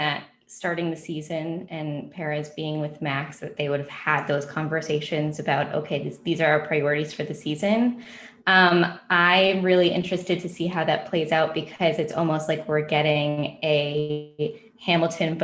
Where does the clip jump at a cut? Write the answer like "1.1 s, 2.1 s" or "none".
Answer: none